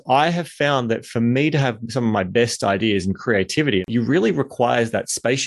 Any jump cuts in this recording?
yes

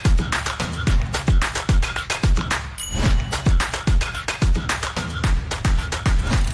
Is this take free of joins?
yes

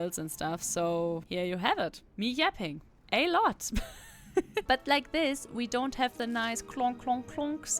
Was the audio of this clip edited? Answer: yes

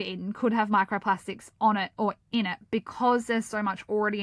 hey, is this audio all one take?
yes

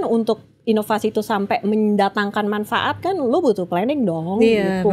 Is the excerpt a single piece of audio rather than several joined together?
yes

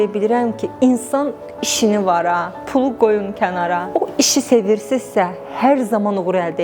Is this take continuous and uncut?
no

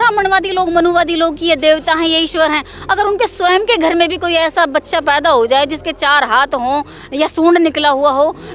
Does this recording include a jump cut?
no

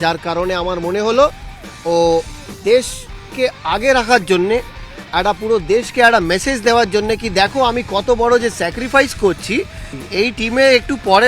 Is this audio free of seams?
no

